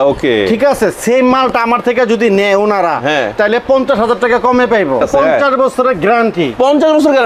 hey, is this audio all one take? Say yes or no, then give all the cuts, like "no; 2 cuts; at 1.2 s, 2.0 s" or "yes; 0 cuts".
no; 1 cut; at 5.1 s